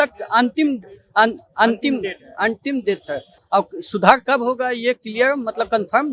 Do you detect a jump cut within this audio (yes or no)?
no